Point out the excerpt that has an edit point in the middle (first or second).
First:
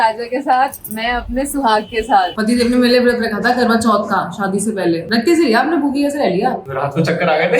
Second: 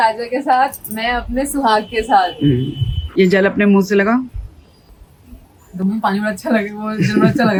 first